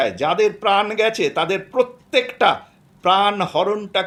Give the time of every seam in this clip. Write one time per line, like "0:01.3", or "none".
none